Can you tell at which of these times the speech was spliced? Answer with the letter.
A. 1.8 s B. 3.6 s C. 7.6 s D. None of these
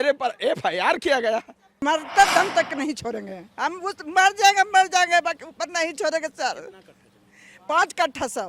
A